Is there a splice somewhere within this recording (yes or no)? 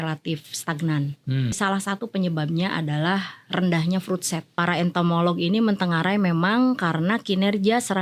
yes